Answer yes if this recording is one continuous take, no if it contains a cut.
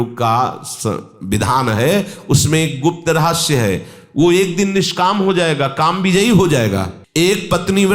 yes